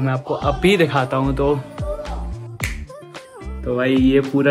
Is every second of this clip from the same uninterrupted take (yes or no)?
yes